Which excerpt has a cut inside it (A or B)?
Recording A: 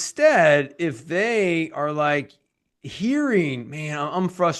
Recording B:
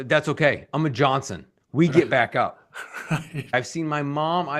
B